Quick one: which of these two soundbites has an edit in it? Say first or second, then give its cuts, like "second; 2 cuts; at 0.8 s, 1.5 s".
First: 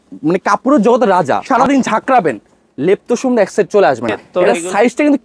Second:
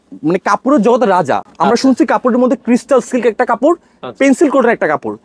first; 2 cuts; at 1.4 s, 4.2 s